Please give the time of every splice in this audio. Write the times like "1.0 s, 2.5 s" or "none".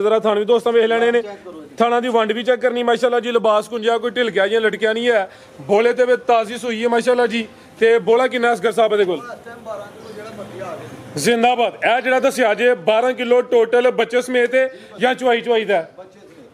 none